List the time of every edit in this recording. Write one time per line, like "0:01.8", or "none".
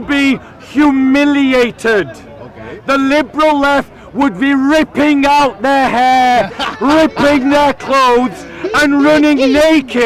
none